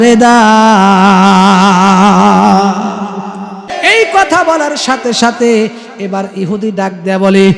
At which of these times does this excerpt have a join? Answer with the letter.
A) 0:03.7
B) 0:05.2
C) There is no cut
A